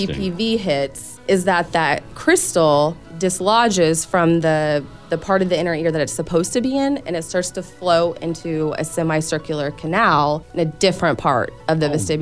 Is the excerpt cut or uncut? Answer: uncut